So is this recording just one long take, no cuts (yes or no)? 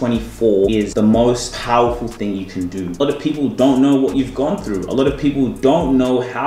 no